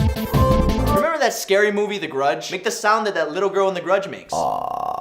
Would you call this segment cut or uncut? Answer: cut